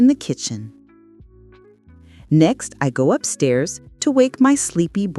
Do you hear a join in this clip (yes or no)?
yes